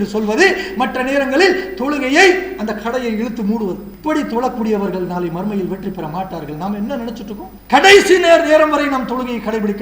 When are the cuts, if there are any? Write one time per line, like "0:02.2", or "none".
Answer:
0:03.9
0:07.5

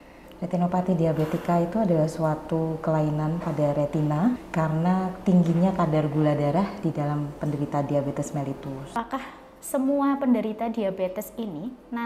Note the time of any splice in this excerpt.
0:04.4
0:08.8

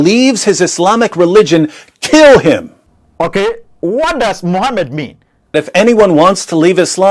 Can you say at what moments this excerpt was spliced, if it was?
0:05.6

